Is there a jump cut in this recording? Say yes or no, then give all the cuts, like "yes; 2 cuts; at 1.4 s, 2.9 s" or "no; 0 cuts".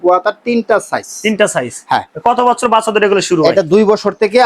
no; 0 cuts